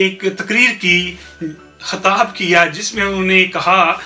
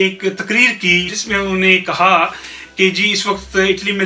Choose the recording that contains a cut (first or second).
second